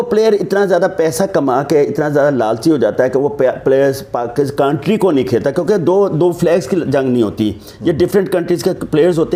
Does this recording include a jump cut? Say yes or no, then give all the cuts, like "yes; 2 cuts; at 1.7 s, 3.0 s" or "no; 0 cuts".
no; 0 cuts